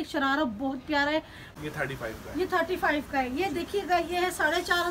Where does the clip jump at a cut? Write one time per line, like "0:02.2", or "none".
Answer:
0:01.4